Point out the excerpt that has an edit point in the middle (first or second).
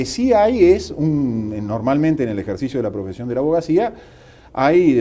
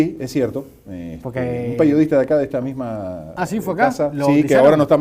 first